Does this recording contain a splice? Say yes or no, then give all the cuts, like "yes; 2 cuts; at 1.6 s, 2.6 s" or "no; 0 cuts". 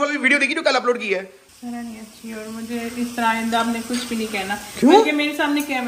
yes; 1 cut; at 1.4 s